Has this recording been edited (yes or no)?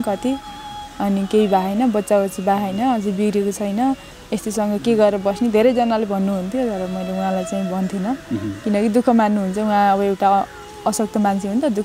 no